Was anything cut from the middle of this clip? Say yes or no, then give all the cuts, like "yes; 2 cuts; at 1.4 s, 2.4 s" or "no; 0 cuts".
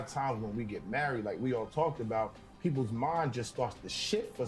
no; 0 cuts